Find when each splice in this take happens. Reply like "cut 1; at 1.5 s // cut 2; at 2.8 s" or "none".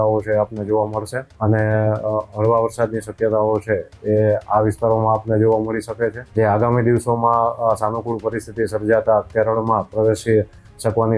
cut 1; at 1.2 s // cut 2; at 6.2 s